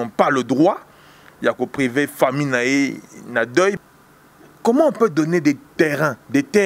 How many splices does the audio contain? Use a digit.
1